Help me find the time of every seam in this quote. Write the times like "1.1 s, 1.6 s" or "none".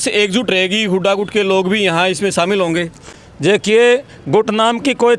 none

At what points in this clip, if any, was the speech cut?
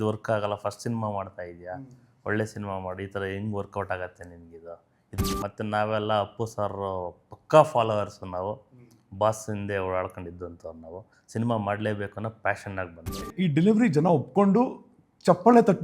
5.2 s, 13.3 s

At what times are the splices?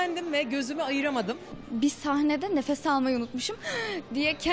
none

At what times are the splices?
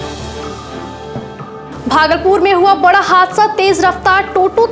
1.1 s

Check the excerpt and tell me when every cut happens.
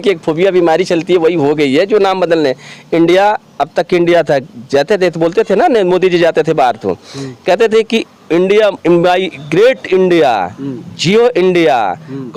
none

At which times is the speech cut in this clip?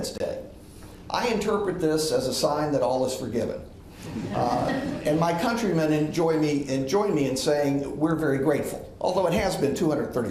none

